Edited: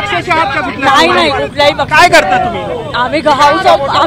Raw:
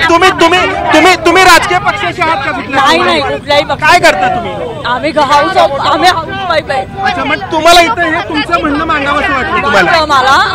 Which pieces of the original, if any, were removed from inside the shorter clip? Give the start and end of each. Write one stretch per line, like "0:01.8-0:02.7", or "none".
none